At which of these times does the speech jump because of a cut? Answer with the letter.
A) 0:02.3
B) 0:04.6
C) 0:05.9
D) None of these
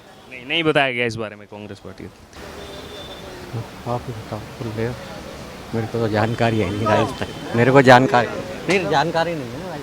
A